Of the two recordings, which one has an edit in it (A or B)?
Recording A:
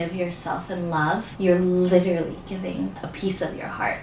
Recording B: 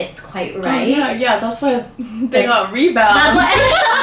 A